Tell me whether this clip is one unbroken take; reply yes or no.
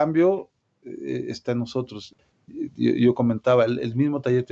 no